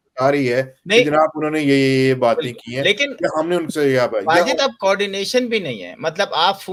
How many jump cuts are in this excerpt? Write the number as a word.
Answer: zero